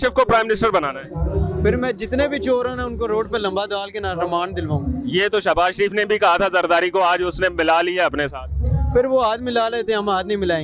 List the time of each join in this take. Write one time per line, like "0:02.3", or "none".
none